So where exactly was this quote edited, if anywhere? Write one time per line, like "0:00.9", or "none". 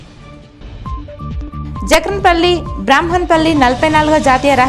none